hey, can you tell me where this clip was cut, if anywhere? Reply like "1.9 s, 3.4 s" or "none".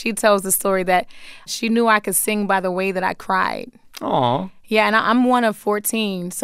1.5 s

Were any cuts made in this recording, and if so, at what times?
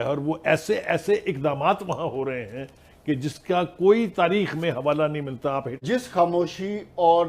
5.8 s

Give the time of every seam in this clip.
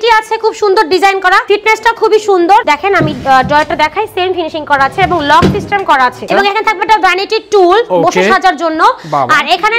1.4 s, 2.6 s, 6.2 s

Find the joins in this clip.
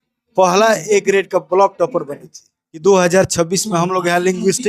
2.8 s

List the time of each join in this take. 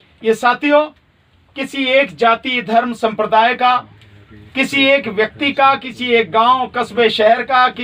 none

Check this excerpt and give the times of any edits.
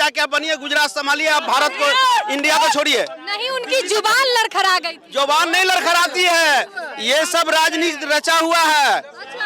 none

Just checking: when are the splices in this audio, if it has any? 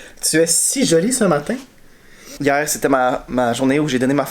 2.3 s

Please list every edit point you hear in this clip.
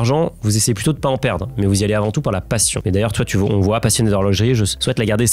none

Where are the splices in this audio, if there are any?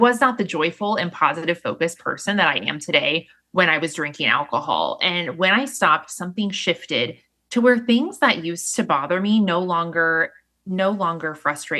none

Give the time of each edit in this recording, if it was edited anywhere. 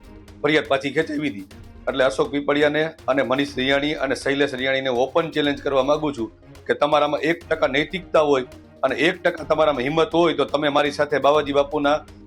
none

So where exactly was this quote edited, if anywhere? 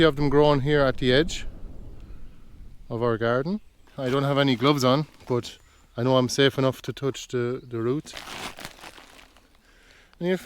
3.9 s, 8.2 s

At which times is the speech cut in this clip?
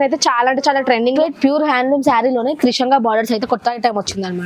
1.1 s

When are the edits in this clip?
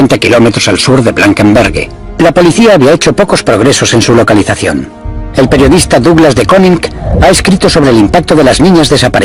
5.0 s

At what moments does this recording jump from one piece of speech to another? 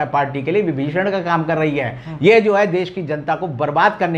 none

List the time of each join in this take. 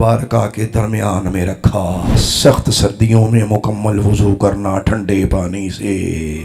2.2 s

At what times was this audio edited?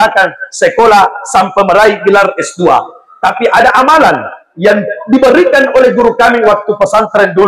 none

